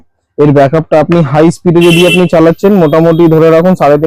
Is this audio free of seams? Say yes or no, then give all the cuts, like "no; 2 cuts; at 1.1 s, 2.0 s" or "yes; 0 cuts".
yes; 0 cuts